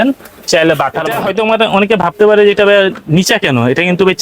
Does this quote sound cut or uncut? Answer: cut